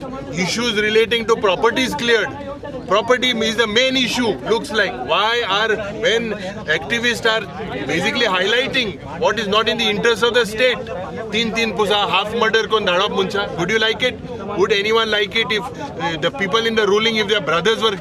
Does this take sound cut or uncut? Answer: uncut